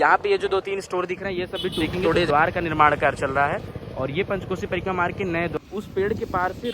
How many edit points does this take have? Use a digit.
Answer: 2